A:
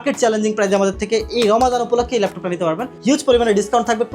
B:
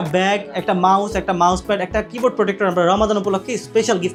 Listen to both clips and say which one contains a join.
A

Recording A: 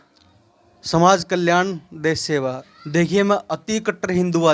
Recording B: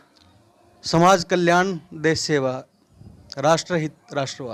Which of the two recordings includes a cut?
A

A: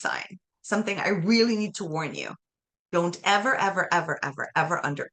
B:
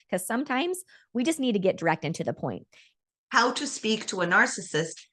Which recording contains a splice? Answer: B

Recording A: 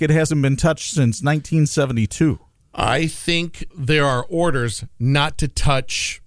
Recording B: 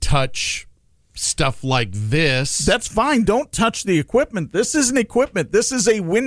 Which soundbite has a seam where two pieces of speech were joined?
A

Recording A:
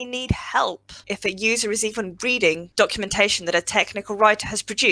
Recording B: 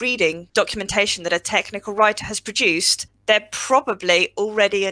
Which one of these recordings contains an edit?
A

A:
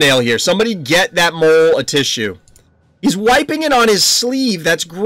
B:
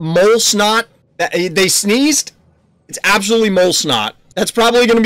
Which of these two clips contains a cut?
B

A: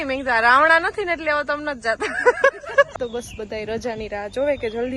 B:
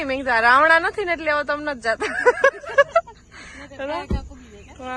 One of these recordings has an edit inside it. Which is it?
A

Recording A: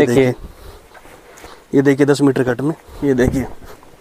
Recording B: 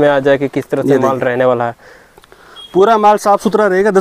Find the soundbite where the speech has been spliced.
A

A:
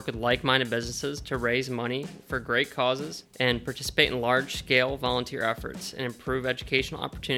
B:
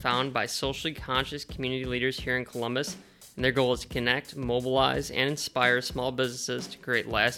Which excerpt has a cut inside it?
A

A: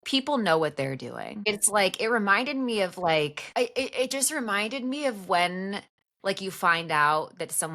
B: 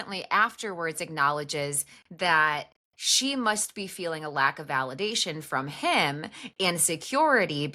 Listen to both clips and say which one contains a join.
A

